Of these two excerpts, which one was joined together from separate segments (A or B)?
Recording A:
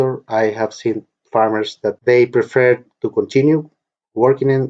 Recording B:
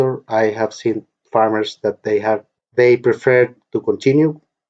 A